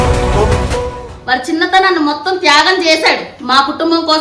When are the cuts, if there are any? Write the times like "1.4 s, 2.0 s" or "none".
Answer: 1.1 s